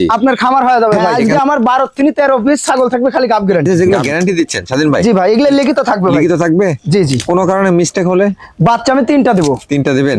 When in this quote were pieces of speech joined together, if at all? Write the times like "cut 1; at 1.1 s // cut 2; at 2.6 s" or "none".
cut 1; at 1.1 s // cut 2; at 3.7 s